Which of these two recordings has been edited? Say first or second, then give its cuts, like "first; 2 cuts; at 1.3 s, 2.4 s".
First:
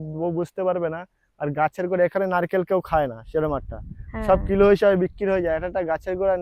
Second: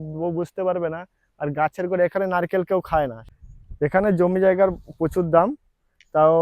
second; 1 cut; at 3.2 s